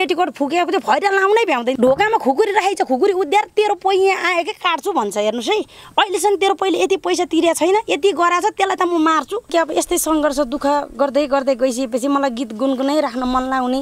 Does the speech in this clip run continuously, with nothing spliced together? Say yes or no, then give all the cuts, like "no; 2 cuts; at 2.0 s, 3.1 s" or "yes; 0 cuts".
no; 2 cuts; at 1.7 s, 9.5 s